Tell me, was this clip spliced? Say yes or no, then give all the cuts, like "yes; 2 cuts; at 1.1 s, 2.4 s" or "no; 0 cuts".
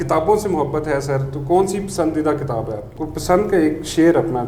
yes; 1 cut; at 3.0 s